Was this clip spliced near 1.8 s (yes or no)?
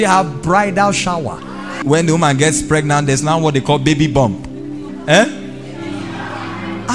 yes